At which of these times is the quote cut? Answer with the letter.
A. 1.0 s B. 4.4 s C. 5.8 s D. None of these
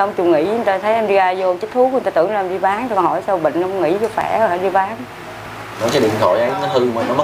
C